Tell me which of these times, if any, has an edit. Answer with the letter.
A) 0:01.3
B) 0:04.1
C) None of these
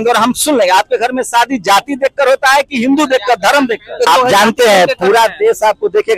B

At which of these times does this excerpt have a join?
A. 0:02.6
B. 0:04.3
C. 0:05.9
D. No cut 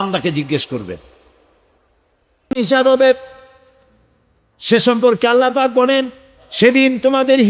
A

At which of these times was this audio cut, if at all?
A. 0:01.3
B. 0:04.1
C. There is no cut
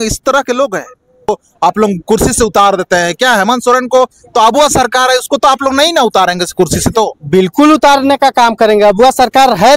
A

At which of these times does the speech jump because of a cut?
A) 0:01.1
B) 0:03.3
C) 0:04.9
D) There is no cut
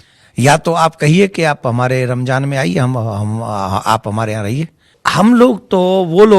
C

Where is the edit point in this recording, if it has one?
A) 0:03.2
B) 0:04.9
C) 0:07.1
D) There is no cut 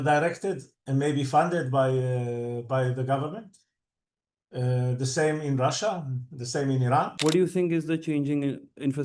C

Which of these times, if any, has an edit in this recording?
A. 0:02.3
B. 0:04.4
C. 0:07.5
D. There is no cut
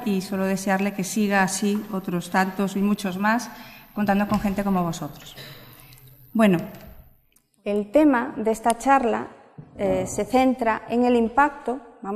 A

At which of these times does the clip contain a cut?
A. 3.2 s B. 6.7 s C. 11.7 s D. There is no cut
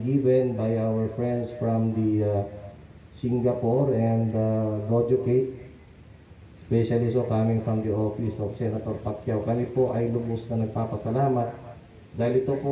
D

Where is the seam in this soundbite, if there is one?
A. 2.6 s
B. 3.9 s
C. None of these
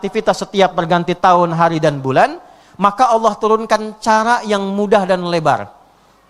C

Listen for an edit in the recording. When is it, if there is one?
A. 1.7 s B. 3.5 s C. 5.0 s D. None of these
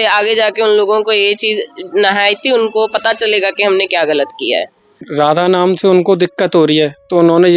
C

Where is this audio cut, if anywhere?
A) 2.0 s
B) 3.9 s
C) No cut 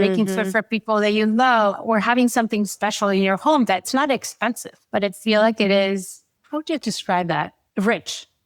B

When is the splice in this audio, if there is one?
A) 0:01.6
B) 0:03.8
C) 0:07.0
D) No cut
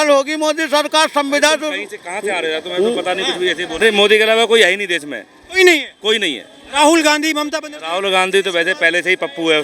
B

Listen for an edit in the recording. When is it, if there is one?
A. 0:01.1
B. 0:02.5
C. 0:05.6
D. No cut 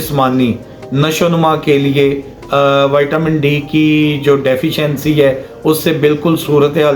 D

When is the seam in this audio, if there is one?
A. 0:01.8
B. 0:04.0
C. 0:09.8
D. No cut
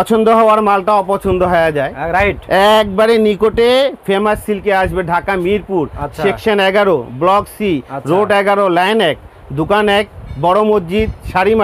D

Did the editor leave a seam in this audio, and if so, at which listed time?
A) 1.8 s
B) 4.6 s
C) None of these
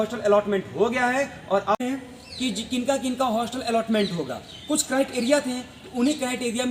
A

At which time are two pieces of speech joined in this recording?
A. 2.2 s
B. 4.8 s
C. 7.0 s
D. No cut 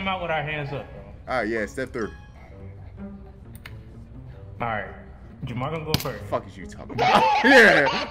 D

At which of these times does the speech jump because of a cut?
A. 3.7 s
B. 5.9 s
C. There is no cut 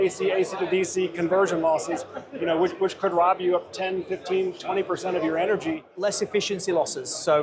B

